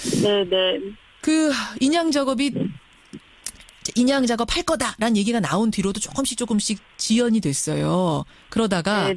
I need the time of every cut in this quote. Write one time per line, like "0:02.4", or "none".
0:02.1